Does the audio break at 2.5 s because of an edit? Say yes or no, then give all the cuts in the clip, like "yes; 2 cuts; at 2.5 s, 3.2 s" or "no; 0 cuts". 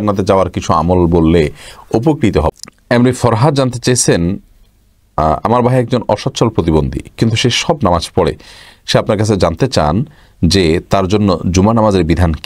yes; 1 cut; at 2.5 s